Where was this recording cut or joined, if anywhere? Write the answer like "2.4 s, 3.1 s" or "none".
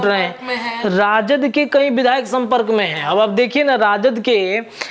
none